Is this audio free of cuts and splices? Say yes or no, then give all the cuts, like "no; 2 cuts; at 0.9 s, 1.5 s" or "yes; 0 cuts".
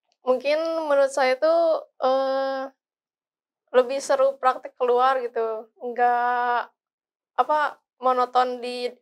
yes; 0 cuts